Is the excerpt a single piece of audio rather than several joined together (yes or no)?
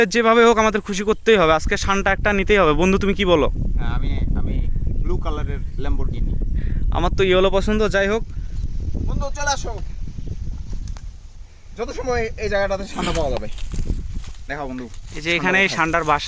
no